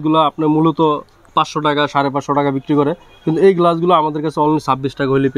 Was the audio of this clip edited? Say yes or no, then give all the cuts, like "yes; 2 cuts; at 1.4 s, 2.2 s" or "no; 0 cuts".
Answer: no; 0 cuts